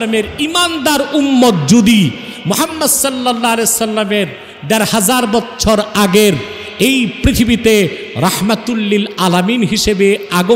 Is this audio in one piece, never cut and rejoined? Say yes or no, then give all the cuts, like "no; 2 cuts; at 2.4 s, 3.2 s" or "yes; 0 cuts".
yes; 0 cuts